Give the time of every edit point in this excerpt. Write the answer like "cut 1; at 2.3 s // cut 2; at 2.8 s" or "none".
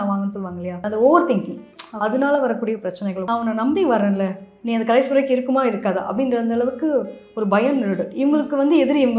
cut 1; at 0.9 s // cut 2; at 3.3 s